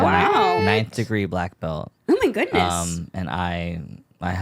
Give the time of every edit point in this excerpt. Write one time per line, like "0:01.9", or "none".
0:01.9